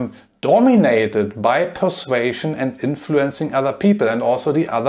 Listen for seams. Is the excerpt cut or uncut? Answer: uncut